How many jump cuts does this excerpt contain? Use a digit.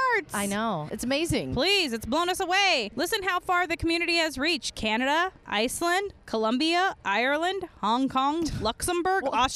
1